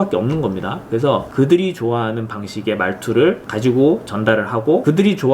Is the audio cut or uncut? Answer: cut